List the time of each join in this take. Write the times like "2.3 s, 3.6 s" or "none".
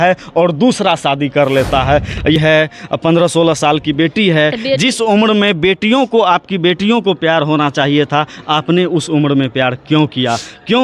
2.4 s